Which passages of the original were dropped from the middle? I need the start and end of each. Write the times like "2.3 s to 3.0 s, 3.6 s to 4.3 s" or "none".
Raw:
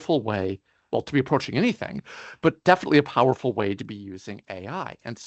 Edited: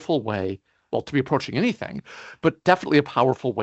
none